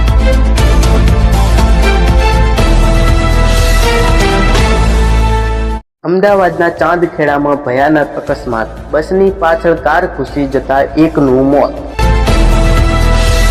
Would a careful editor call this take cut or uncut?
cut